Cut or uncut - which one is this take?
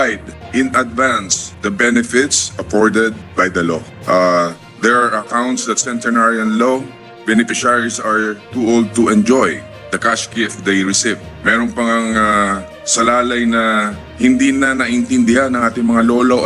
uncut